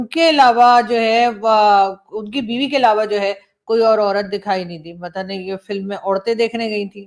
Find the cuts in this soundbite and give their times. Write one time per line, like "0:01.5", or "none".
none